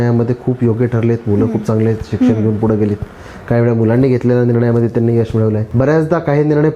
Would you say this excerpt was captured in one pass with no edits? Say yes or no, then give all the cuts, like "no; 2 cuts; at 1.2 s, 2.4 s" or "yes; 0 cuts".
no; 1 cut; at 5.7 s